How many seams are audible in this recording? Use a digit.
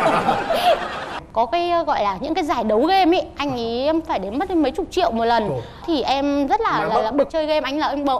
2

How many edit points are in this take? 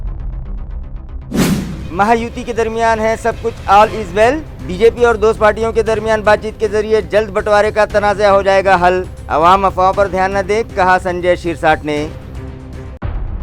0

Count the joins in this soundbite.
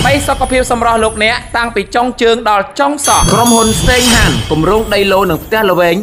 1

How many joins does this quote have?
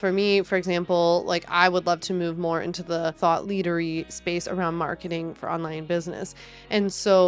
1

